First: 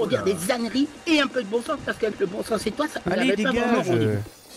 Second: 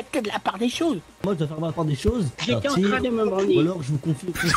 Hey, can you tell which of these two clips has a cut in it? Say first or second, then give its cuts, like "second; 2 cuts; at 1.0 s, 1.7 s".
second; 1 cut; at 2.4 s